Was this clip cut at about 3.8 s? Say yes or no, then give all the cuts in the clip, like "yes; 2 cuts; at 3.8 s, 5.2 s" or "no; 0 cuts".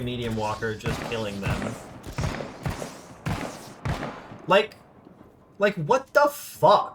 no; 0 cuts